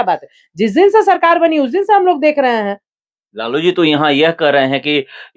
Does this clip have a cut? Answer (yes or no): no